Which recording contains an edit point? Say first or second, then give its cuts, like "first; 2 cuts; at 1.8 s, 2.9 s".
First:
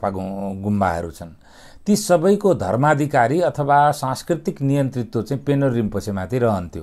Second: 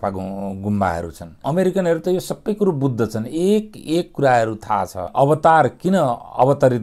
second; 2 cuts; at 1.3 s, 5.0 s